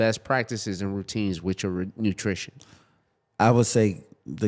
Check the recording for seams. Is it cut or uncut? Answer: uncut